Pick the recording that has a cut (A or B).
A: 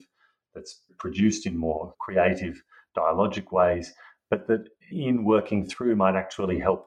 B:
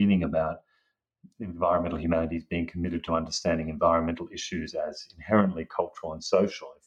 A